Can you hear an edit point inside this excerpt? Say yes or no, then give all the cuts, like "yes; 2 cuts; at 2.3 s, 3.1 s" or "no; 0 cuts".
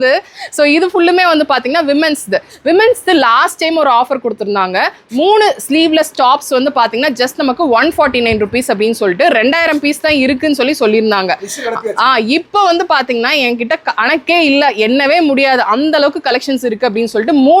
no; 0 cuts